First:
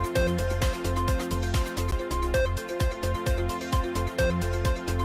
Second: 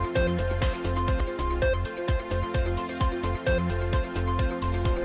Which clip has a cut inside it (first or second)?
second